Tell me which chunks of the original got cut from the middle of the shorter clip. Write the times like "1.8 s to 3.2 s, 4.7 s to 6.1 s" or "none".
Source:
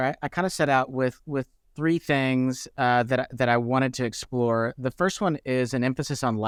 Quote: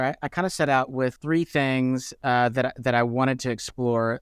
1.2 s to 1.7 s